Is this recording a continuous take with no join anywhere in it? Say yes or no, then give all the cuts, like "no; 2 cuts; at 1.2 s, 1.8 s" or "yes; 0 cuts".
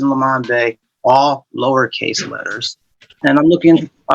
no; 1 cut; at 3.1 s